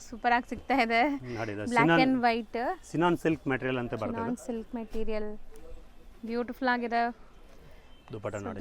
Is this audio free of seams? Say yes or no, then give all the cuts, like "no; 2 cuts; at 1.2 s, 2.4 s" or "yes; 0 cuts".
yes; 0 cuts